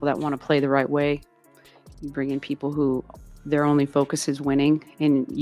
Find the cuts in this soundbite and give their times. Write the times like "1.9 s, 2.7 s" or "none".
none